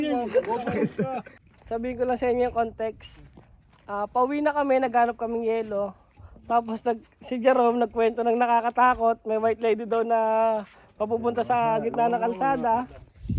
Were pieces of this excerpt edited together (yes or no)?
yes